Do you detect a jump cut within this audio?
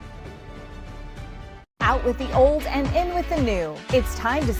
yes; 1 cut; at 1.6 s

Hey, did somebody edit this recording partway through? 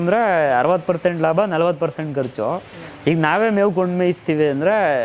no; 0 cuts

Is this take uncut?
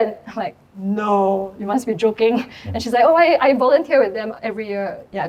yes; 0 cuts

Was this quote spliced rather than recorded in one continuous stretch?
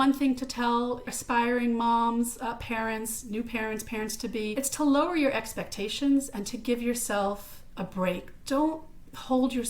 yes; 2 cuts; at 1.2 s, 4.5 s

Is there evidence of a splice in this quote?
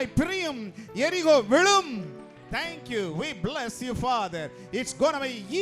no; 0 cuts

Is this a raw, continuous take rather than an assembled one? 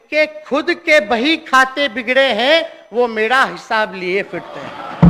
yes; 0 cuts

